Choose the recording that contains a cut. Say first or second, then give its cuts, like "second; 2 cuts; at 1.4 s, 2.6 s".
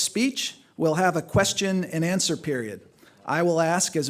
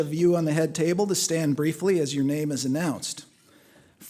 second; 1 cut; at 2.8 s